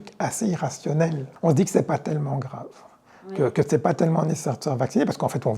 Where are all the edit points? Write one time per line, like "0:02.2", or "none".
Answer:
0:01.2